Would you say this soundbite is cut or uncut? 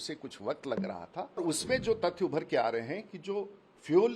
cut